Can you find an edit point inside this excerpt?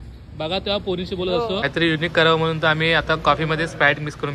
yes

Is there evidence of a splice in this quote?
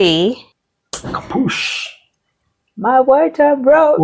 yes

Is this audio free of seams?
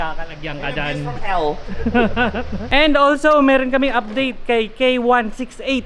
no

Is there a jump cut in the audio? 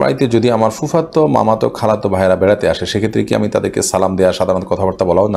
no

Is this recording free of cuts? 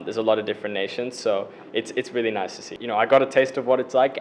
no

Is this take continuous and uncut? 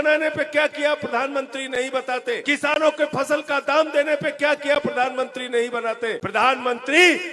no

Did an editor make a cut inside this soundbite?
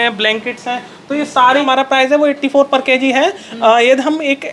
yes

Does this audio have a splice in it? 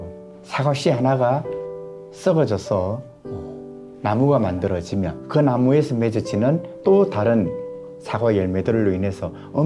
no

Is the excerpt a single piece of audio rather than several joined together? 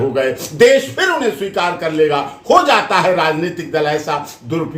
yes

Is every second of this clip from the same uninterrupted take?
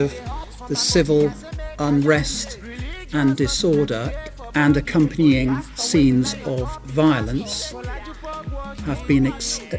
no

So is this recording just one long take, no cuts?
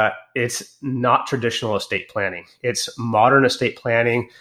yes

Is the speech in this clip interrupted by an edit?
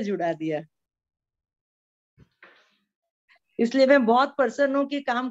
no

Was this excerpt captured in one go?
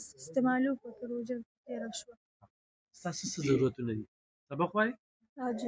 yes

